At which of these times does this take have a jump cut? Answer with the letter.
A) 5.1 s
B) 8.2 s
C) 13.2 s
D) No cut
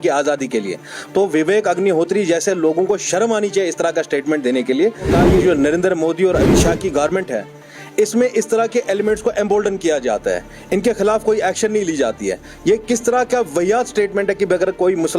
A